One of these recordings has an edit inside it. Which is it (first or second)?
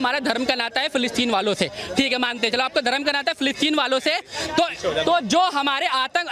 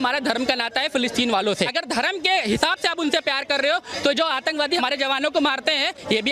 second